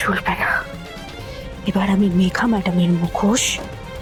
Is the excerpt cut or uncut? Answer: uncut